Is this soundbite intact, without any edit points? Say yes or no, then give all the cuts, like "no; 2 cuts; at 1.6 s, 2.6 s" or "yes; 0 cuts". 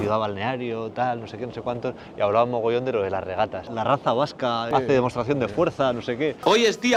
yes; 0 cuts